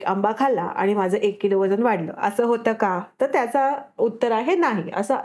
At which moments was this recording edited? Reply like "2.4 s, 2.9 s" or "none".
none